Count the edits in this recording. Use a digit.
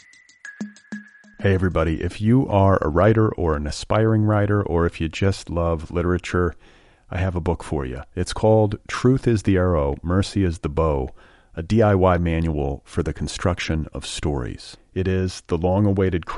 1